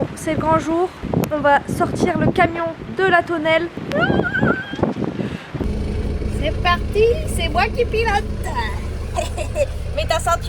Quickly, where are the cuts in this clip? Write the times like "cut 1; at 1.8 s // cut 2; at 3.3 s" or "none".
cut 1; at 3.8 s // cut 2; at 5.7 s